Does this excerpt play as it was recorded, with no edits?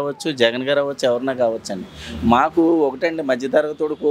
yes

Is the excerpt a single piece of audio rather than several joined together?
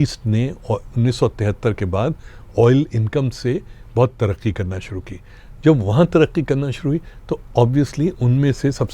yes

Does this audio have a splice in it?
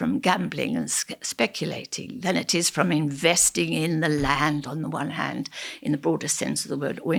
no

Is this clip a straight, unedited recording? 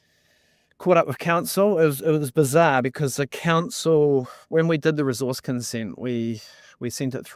yes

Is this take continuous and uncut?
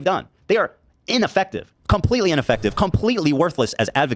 yes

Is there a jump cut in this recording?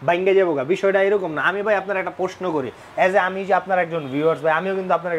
no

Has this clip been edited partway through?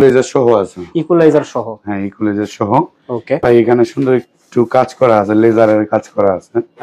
yes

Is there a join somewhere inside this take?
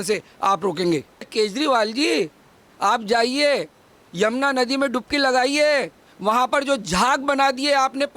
yes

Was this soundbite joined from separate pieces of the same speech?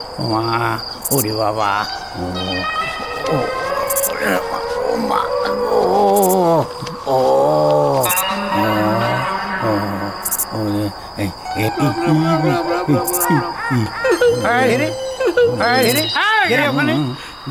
no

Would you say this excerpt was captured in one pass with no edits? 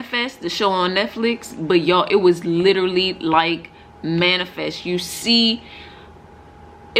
yes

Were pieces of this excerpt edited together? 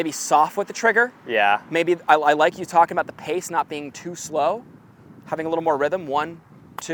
no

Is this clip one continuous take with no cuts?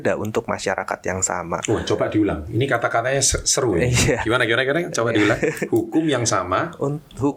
yes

